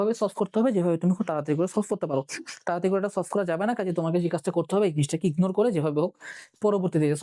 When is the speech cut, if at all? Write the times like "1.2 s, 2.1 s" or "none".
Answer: none